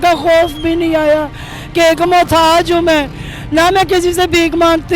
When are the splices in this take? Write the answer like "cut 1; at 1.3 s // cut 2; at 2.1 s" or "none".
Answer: none